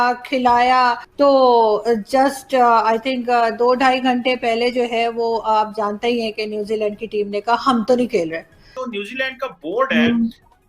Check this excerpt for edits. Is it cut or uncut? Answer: cut